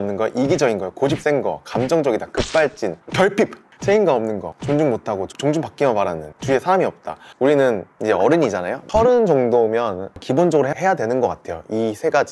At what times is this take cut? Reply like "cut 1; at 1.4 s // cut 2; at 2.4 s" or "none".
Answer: cut 1; at 3.6 s // cut 2; at 4.5 s // cut 3; at 6.3 s // cut 4; at 7.2 s // cut 5; at 7.9 s